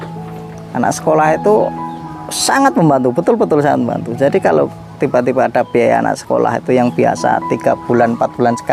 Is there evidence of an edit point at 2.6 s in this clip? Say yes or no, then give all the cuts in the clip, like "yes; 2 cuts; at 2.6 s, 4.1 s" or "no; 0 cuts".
no; 0 cuts